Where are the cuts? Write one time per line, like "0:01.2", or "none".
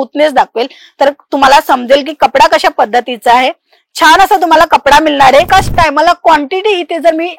0:05.5